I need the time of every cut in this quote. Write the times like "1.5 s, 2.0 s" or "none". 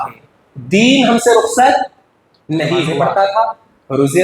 3.0 s